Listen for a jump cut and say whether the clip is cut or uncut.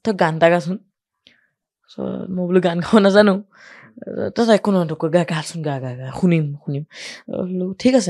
uncut